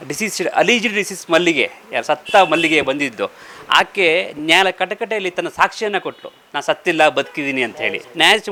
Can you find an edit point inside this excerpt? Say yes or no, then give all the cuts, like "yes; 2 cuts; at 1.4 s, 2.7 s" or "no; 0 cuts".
no; 0 cuts